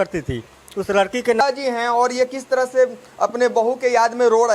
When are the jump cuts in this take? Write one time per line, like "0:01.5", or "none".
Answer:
0:01.4

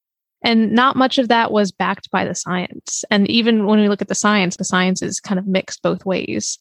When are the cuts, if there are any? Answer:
0:04.5

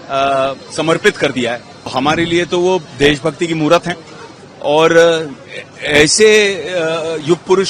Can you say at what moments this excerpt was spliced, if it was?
0:01.9

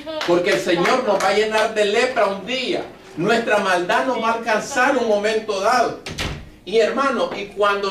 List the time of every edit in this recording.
0:01.9

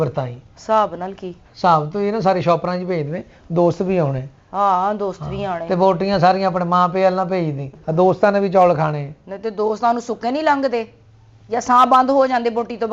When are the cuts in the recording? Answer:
none

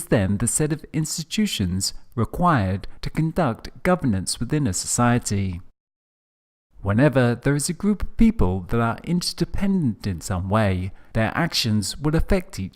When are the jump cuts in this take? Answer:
0:05.5

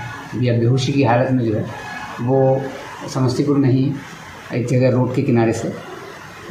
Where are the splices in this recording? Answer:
none

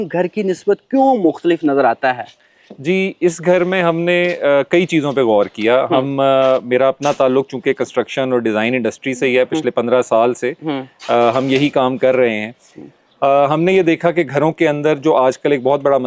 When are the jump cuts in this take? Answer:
none

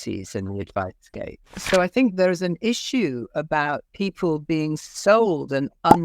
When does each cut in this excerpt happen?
0:01.6
0:03.9

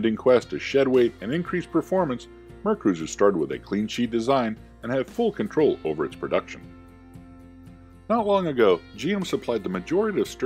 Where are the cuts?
0:06.2

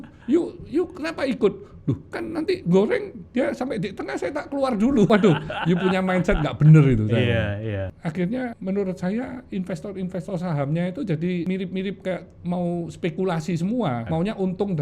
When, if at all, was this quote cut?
0:05.1
0:07.7
0:08.6
0:11.5
0:14.0

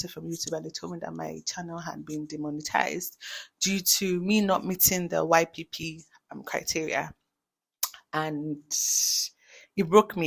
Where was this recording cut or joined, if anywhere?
none

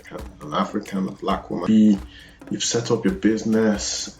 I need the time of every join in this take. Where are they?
0:01.6

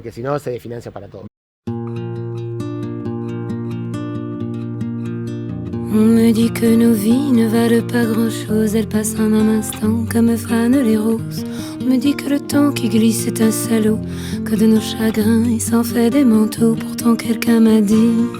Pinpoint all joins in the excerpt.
0:01.2

